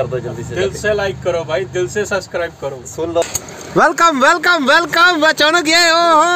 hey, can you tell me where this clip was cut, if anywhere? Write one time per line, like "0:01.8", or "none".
0:03.2